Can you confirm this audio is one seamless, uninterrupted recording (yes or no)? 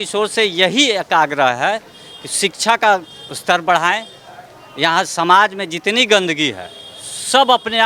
yes